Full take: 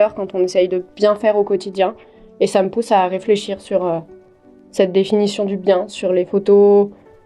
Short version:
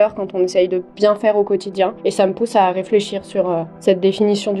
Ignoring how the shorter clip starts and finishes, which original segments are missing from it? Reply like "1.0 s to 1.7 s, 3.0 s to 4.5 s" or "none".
2.0 s to 2.3 s, 4.1 s to 4.6 s